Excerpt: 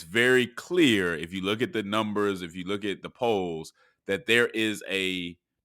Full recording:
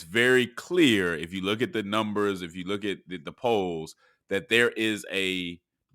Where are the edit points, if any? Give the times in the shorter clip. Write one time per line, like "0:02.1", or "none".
0:03.1